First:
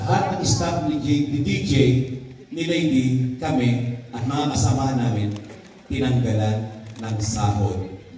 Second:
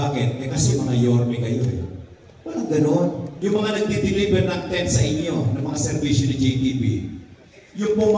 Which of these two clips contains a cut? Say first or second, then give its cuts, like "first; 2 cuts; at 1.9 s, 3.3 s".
second; 1 cut; at 3.3 s